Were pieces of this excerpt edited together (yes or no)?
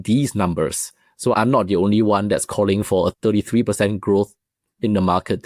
yes